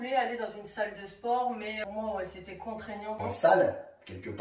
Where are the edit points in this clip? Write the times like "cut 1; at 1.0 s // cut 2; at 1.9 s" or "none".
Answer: cut 1; at 1.8 s // cut 2; at 3.2 s

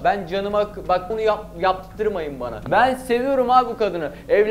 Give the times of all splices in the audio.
cut 1; at 1.1 s // cut 2; at 2.6 s

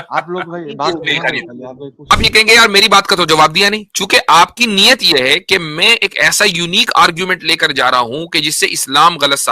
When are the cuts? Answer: cut 1; at 2.1 s

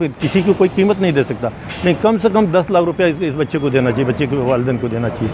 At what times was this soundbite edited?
none

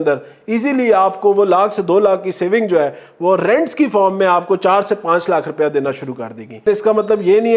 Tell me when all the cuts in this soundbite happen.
cut 1; at 6.7 s

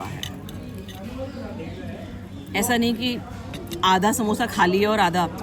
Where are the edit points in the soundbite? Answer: none

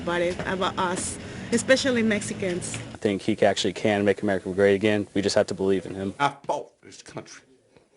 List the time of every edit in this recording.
cut 1; at 3.0 s // cut 2; at 6.2 s

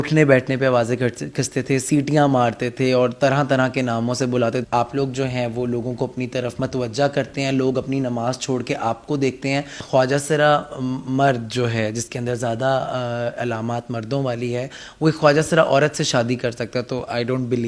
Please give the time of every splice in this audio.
cut 1; at 4.6 s // cut 2; at 9.8 s

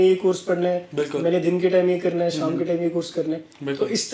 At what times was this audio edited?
none

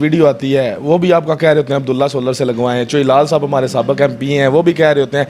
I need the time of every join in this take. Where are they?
none

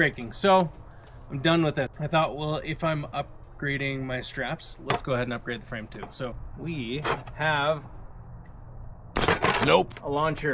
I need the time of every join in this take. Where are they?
cut 1; at 1.9 s // cut 2; at 6.5 s

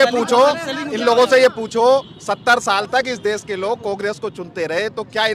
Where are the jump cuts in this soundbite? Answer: none

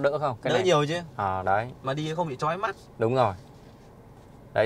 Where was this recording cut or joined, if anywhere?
none

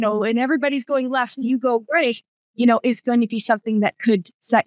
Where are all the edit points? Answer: none

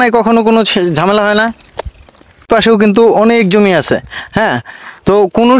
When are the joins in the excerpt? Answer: cut 1; at 2.5 s

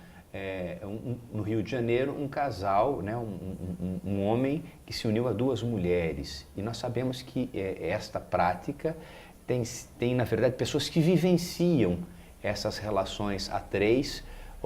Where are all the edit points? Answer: cut 1; at 5.3 s

